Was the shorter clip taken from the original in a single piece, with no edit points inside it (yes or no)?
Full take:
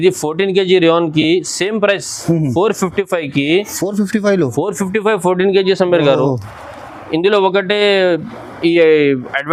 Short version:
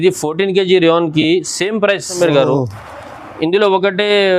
no